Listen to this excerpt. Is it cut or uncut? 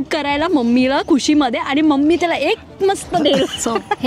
uncut